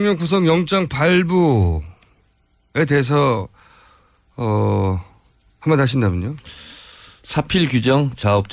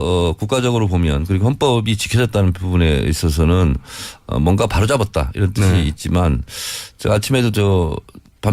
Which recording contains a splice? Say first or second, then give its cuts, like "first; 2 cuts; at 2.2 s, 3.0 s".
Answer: first; 1 cut; at 3.5 s